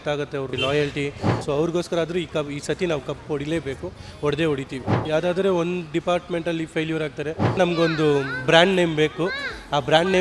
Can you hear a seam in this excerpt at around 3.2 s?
no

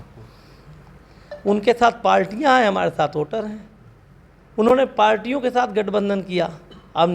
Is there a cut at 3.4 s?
no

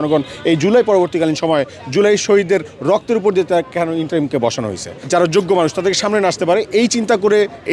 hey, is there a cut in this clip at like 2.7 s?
no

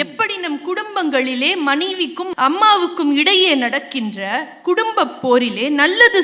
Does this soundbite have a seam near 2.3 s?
yes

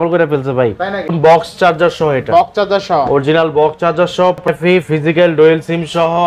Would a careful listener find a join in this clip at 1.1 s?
yes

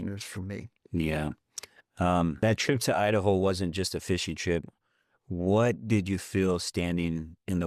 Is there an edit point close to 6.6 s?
no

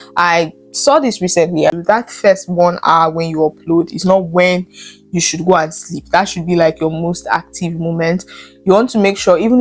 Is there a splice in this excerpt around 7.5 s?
no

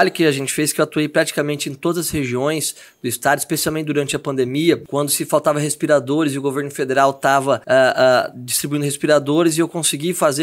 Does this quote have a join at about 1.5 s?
no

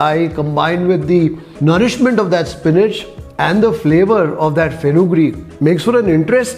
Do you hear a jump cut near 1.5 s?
yes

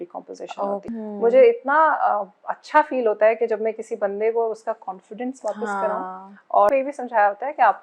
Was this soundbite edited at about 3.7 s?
no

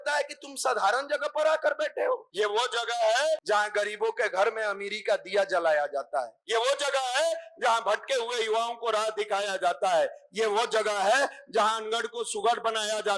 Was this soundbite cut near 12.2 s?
no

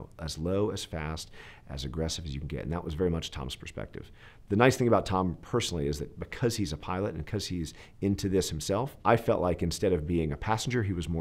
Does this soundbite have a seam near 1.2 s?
no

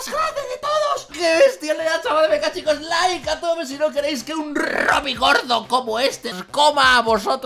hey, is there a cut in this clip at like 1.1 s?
yes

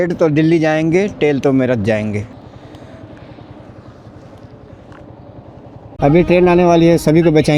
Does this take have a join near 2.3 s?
yes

